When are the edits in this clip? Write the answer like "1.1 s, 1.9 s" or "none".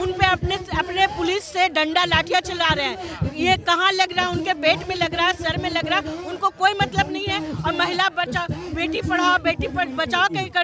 none